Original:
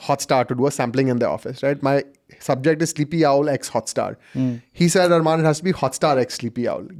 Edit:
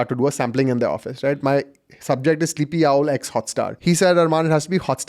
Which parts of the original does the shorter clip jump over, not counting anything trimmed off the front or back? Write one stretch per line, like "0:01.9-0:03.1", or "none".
0:04.1-0:04.7